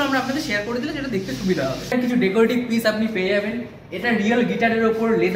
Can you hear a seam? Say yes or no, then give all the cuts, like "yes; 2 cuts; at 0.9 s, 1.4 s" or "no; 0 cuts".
yes; 1 cut; at 1.9 s